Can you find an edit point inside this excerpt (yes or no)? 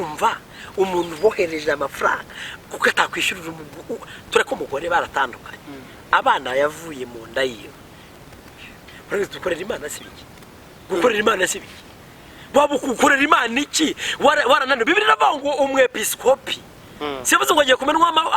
no